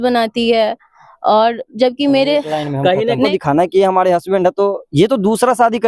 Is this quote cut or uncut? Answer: cut